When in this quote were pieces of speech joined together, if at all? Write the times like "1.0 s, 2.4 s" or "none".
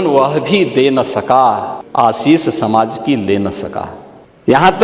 none